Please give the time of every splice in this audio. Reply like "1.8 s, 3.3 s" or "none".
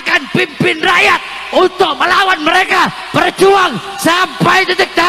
none